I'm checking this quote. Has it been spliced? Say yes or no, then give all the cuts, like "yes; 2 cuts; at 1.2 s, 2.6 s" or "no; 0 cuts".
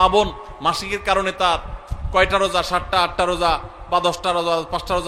no; 0 cuts